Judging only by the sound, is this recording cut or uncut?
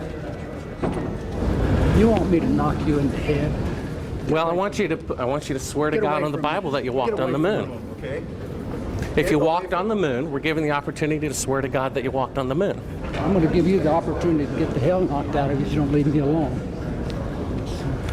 cut